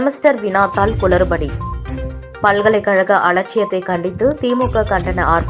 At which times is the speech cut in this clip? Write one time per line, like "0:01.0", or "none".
none